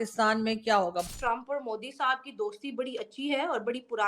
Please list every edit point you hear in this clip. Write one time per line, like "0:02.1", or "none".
0:01.1